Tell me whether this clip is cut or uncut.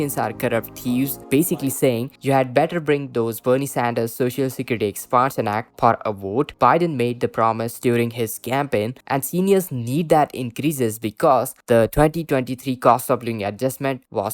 uncut